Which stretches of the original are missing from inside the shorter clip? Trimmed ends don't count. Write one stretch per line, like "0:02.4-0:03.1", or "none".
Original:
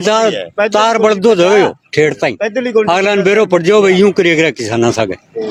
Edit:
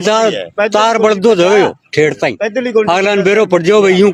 none